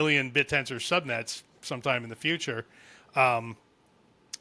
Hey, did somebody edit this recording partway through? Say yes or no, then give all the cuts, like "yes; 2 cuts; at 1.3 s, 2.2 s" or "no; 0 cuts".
no; 0 cuts